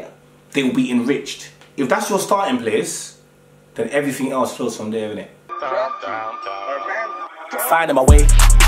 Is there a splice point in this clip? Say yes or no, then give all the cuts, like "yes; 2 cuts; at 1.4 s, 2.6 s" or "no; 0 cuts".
yes; 1 cut; at 5.5 s